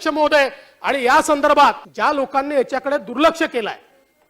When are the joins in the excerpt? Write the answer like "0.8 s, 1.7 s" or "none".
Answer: 1.9 s

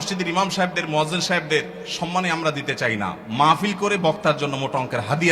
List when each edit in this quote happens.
none

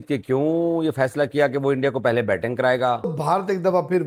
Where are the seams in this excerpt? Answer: 3.1 s

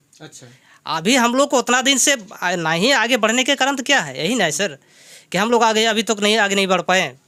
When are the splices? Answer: none

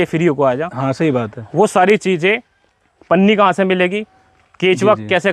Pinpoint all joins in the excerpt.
none

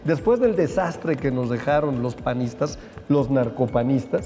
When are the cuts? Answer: none

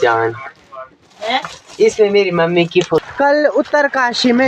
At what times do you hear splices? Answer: 3.0 s

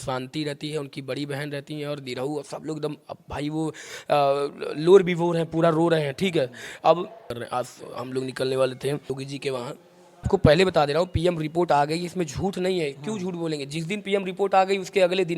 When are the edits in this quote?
7.3 s, 9.1 s, 10.3 s

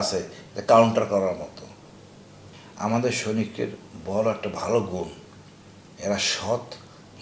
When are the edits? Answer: 2.3 s

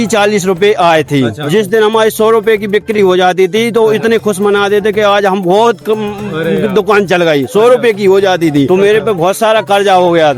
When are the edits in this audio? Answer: 1.4 s, 8.7 s

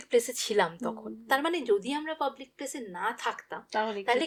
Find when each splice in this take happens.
none

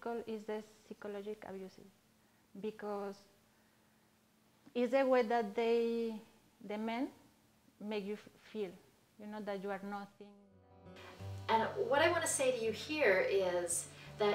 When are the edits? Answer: 10.4 s

